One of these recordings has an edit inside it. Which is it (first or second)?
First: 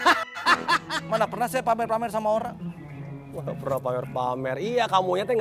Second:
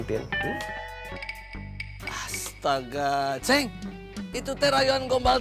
first